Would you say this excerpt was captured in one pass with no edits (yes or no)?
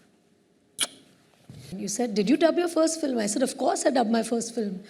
no